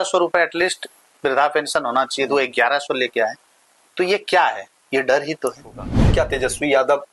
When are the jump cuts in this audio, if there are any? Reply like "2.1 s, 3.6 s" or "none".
5.9 s